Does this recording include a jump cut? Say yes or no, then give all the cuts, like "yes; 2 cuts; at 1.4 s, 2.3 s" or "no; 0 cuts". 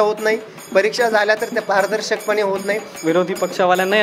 yes; 1 cut; at 2.9 s